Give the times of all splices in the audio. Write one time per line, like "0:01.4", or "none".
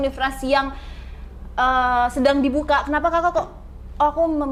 none

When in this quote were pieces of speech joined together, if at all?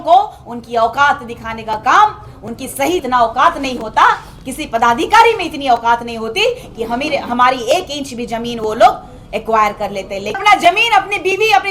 0:03.0
0:10.3

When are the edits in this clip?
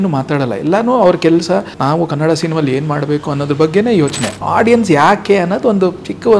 0:01.7
0:04.4

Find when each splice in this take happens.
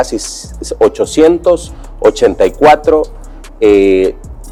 none

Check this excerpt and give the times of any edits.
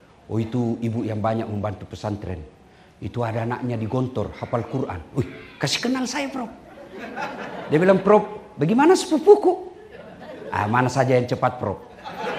none

